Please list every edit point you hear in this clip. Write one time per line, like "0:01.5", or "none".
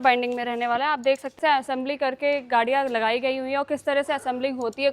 0:01.4

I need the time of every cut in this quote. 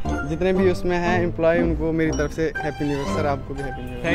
none

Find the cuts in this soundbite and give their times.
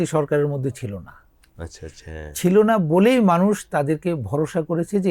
none

